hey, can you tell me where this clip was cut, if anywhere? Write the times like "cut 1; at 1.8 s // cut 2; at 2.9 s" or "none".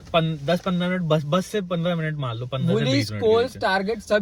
none